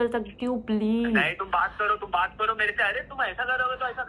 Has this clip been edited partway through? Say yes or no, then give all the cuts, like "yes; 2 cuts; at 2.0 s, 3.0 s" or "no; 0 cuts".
no; 0 cuts